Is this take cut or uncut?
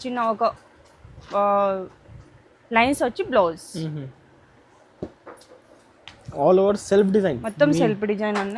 uncut